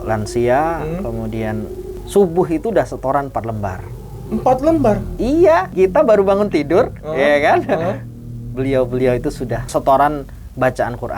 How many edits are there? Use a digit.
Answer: 3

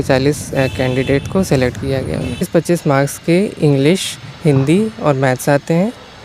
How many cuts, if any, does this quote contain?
1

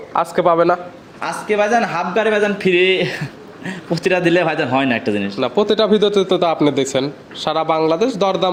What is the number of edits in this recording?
0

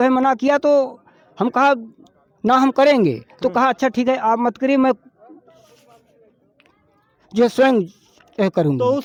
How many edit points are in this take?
0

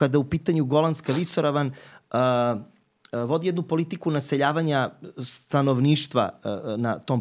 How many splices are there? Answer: 0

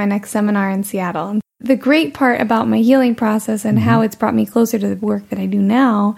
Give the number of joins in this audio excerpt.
1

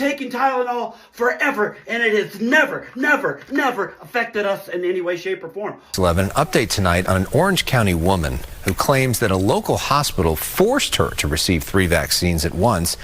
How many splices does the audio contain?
1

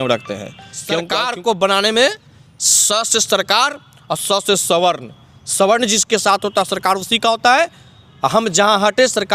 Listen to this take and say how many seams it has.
1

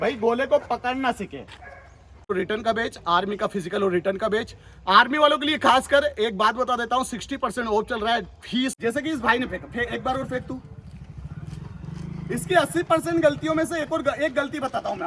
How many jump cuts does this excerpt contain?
2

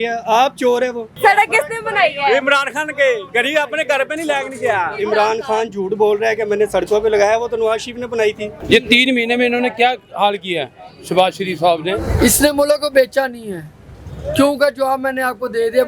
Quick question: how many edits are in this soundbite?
4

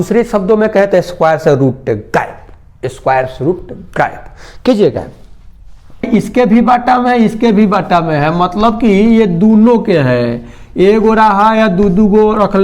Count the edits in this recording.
1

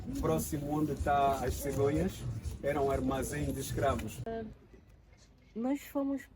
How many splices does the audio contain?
1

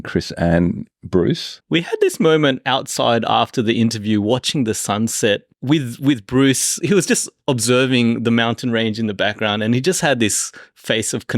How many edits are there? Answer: 3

